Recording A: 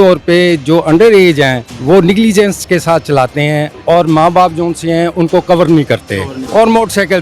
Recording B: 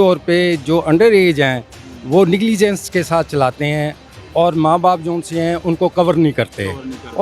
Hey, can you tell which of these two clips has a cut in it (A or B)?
A